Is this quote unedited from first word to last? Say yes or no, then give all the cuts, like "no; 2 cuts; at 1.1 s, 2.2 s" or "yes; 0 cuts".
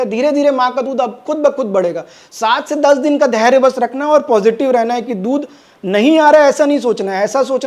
yes; 0 cuts